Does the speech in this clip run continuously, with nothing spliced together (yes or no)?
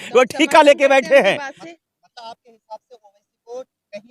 yes